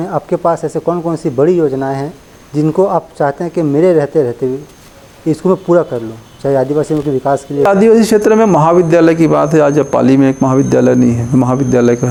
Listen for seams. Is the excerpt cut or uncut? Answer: uncut